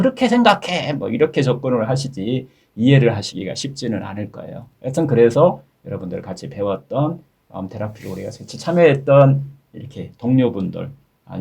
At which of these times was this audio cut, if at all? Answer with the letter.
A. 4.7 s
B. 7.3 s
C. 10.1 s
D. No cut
B